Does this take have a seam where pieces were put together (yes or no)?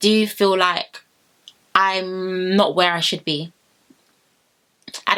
no